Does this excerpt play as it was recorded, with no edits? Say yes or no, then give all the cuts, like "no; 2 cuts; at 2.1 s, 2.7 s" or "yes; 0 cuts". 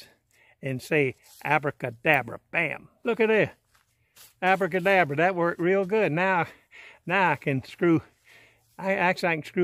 no; 1 cut; at 2.9 s